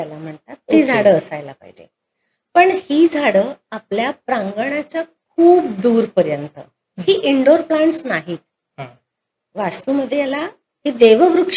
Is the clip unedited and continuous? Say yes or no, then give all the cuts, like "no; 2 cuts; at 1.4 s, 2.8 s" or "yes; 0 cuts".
yes; 0 cuts